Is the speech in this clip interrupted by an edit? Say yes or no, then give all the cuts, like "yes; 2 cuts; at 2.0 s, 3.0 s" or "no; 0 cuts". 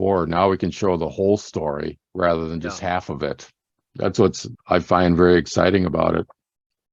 yes; 1 cut; at 4.5 s